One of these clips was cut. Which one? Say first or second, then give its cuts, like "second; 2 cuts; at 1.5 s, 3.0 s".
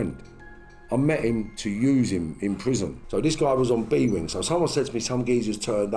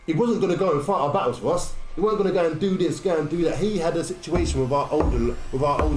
first; 1 cut; at 3.0 s